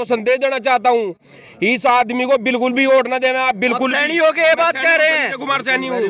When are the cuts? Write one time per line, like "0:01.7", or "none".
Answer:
none